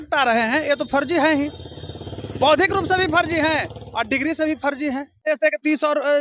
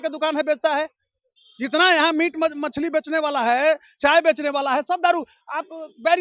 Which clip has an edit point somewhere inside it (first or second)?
first